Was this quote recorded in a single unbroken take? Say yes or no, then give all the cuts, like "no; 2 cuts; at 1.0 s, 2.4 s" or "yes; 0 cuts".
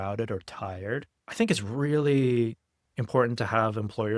no; 1 cut; at 1.2 s